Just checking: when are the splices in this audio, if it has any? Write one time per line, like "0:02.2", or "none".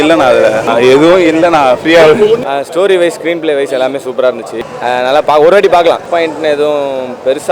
0:04.5
0:06.0